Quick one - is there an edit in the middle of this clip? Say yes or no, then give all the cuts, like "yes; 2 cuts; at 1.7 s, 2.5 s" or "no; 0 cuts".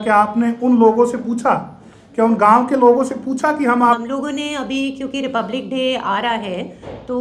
yes; 1 cut; at 3.8 s